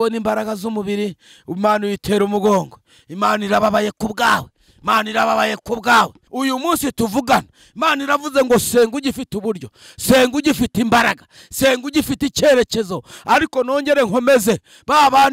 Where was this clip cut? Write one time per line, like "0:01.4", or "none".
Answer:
0:06.2